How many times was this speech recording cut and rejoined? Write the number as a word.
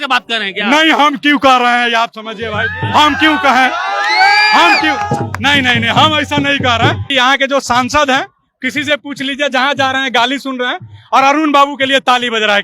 one